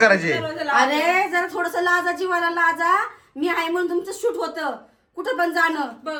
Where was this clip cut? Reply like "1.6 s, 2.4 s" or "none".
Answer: none

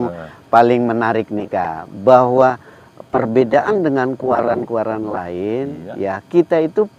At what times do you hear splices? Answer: none

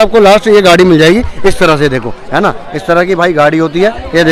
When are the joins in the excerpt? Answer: none

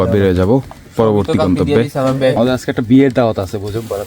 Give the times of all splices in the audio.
2.4 s

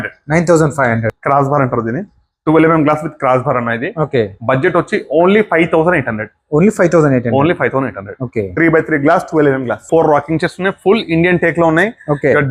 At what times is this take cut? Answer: 1.1 s, 9.9 s

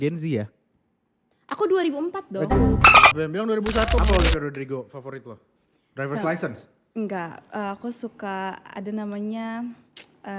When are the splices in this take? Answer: 4.0 s

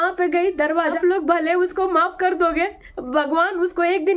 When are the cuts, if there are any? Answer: 1.0 s

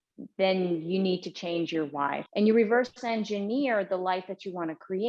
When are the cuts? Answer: 2.2 s

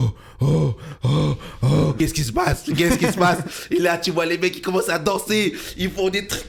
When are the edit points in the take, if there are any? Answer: 2.0 s

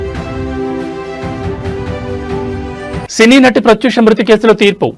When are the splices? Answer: 2.7 s

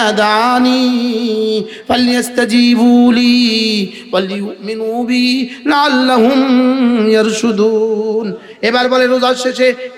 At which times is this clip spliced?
none

